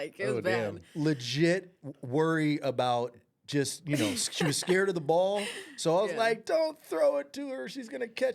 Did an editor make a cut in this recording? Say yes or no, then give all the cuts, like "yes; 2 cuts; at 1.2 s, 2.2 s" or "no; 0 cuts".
no; 0 cuts